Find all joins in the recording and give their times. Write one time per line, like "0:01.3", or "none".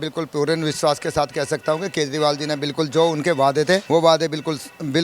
0:03.8